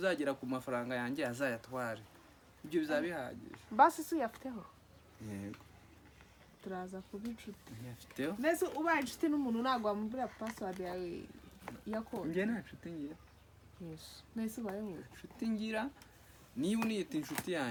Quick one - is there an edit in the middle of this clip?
no; 0 cuts

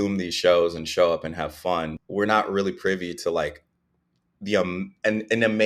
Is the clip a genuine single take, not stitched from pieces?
no; 1 cut; at 2.0 s

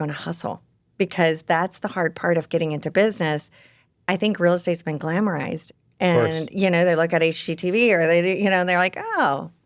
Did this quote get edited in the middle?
no; 0 cuts

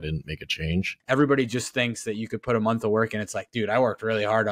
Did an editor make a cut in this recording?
yes; 1 cut; at 1.0 s

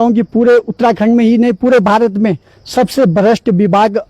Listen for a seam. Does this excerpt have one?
no; 0 cuts

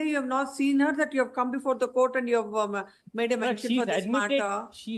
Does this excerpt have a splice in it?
no; 0 cuts

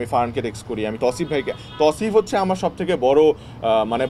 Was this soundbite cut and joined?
no; 0 cuts

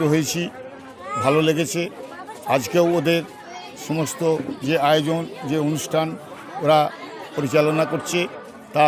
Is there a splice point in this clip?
no; 0 cuts

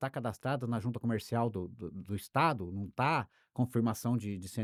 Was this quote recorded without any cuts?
yes; 0 cuts

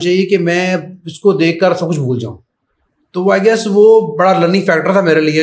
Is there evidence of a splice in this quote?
no; 0 cuts

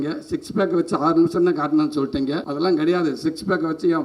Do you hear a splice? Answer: yes; 1 cut; at 2.5 s

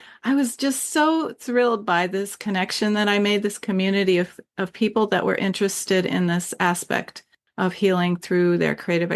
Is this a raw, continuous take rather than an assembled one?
yes; 0 cuts

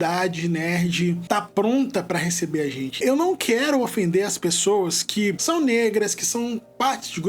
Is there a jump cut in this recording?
yes; 3 cuts; at 1.2 s, 3.0 s, 5.4 s

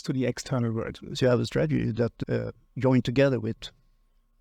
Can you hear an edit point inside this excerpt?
no; 0 cuts

